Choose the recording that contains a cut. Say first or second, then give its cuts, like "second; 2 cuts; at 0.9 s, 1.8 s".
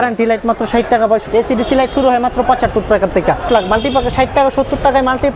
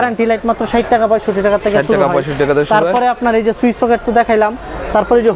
first; 2 cuts; at 1.3 s, 3.5 s